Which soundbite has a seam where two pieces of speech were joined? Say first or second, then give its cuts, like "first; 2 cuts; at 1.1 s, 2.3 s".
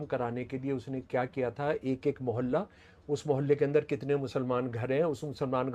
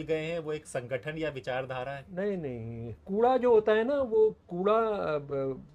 second; 1 cut; at 3.0 s